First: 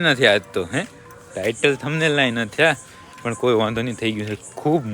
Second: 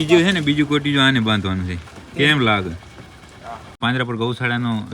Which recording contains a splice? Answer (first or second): second